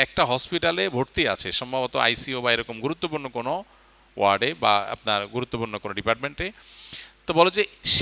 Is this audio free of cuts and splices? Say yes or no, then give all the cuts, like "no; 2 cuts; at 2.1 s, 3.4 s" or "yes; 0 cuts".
yes; 0 cuts